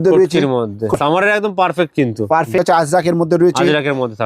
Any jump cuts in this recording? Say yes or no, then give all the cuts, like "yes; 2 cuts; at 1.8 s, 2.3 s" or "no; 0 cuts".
yes; 2 cuts; at 1.0 s, 2.6 s